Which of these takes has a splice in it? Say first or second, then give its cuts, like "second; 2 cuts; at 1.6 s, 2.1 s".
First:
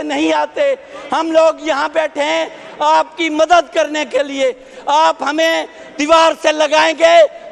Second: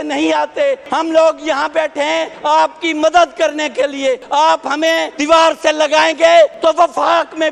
second; 5 cuts; at 0.8 s, 2.3 s, 4.2 s, 5.1 s, 6.6 s